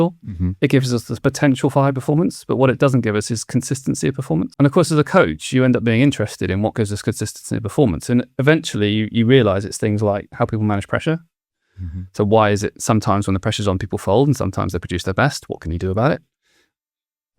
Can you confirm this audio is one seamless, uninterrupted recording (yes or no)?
no